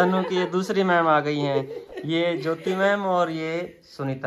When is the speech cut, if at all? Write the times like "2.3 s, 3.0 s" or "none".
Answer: none